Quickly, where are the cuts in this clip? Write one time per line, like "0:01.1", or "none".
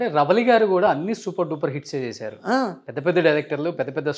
none